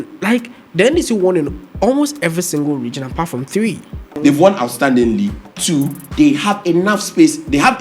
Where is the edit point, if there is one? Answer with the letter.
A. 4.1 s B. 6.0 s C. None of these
A